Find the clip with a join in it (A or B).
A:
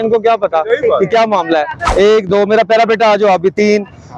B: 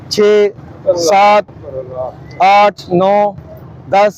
A